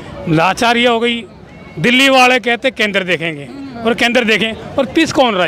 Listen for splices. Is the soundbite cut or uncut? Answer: uncut